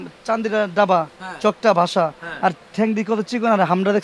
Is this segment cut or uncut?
uncut